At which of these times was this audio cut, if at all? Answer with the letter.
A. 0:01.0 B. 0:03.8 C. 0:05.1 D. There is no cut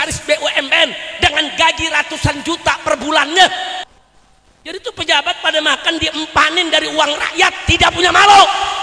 B